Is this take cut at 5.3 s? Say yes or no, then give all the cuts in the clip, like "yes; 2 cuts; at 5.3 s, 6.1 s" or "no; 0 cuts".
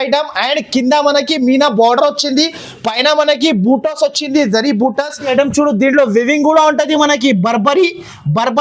yes; 1 cut; at 5.3 s